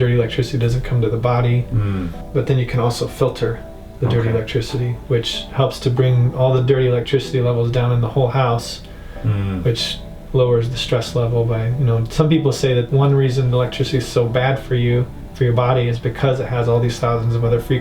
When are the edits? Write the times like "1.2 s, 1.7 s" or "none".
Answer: 2.2 s, 12.9 s